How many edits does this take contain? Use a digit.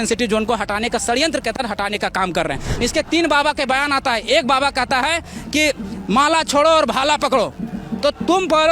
1